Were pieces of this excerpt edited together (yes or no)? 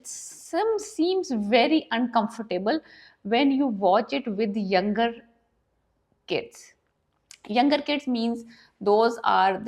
no